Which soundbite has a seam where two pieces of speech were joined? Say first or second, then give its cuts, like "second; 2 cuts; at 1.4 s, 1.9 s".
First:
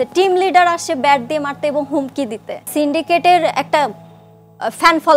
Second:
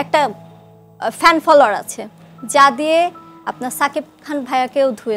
first; 1 cut; at 2.7 s